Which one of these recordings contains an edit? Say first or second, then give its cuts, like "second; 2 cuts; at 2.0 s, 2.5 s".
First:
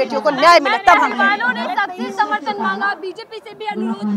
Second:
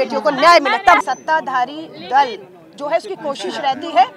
second; 1 cut; at 1.0 s